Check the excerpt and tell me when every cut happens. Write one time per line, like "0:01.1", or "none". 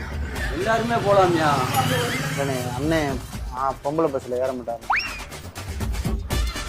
none